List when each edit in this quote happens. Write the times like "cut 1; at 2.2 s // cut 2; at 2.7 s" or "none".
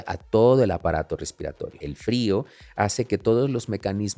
cut 1; at 1.8 s